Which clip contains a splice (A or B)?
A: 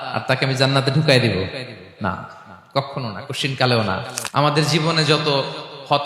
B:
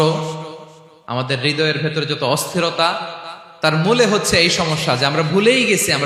A